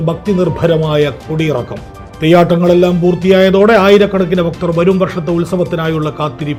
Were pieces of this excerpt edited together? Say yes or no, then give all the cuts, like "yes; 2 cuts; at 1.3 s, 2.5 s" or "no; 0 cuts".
no; 0 cuts